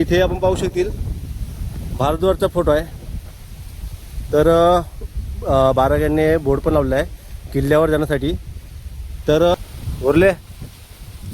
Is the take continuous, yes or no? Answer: no